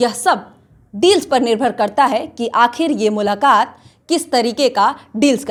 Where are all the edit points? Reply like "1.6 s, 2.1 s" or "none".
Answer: none

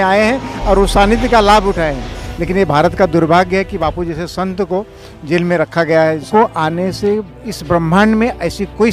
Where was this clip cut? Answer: 2.1 s, 6.3 s

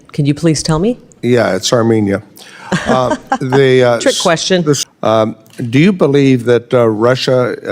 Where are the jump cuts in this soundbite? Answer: 4.8 s

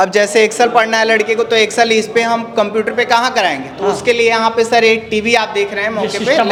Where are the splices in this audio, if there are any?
none

